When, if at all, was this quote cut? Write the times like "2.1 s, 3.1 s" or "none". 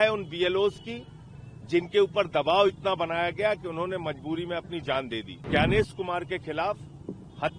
5.5 s